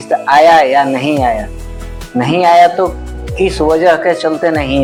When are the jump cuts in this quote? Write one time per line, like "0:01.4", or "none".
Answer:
none